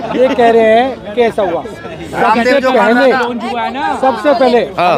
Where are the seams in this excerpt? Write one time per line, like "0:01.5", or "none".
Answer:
none